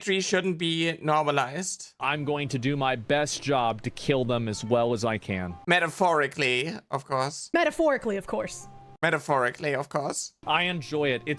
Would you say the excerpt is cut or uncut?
cut